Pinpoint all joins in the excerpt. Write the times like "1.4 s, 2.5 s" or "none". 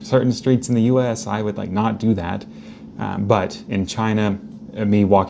none